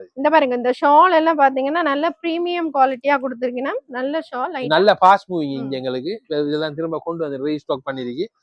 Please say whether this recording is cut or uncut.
uncut